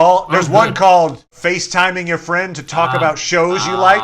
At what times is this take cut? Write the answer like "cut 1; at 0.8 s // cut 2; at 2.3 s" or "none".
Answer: cut 1; at 1.3 s